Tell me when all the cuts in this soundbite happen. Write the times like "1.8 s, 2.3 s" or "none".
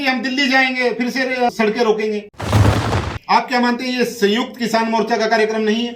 2.8 s